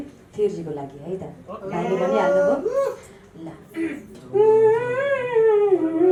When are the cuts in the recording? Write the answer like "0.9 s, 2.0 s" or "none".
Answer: none